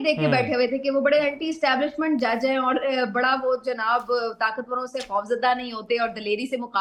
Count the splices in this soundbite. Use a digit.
0